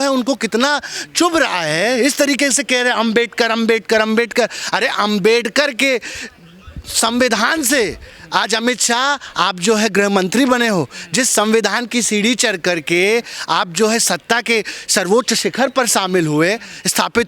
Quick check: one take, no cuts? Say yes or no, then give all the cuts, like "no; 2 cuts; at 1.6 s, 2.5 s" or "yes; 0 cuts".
yes; 0 cuts